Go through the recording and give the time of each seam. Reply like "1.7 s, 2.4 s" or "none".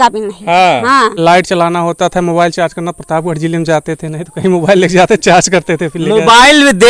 1.1 s

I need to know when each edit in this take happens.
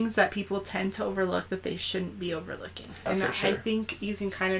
3.1 s

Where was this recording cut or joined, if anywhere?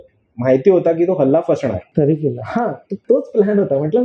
1.9 s, 2.9 s

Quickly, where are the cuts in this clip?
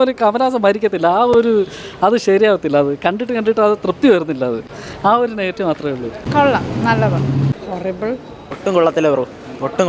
none

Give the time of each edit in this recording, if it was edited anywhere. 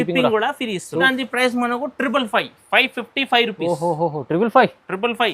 1.1 s

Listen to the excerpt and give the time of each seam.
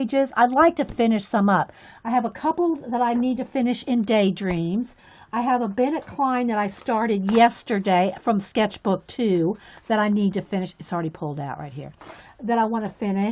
none

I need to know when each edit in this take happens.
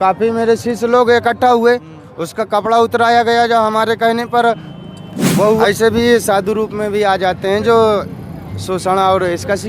5.2 s

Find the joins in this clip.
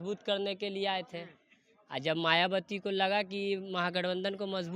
none

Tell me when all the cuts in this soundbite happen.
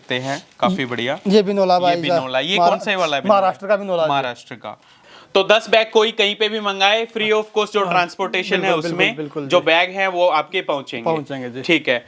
5.1 s

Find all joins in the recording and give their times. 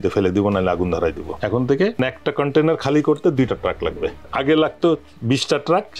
1.3 s, 2.0 s, 4.2 s

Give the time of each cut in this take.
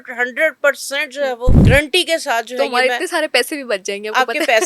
1.6 s

